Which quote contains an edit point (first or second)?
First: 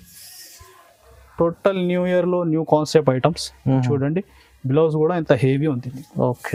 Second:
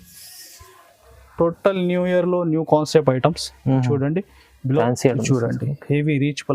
second